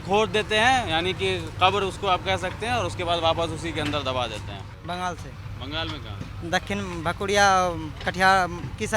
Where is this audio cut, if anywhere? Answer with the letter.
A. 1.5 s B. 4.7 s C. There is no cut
B